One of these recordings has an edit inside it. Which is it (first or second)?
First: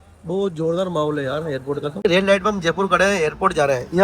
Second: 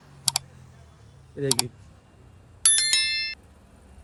first